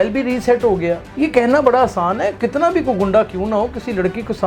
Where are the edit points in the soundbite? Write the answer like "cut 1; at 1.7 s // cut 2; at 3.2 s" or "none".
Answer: cut 1; at 1.1 s // cut 2; at 2.4 s